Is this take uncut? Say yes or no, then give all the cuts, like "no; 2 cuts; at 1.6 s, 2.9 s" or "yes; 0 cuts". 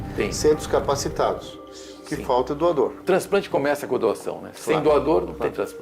no; 1 cut; at 3.0 s